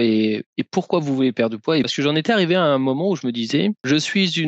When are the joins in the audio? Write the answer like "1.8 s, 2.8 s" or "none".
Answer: 1.9 s